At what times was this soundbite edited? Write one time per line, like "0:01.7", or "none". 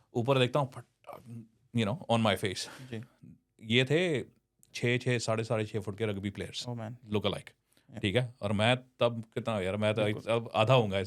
none